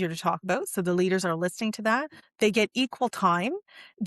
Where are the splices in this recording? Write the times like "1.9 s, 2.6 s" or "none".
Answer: 2.2 s